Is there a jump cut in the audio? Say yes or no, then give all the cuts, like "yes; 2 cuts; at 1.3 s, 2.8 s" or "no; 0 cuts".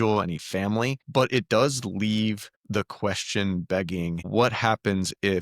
yes; 3 cuts; at 1.0 s, 2.5 s, 4.3 s